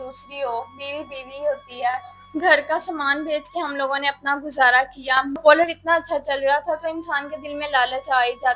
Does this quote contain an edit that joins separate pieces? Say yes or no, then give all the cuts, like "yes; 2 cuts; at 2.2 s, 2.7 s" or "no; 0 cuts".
yes; 2 cuts; at 2.1 s, 5.4 s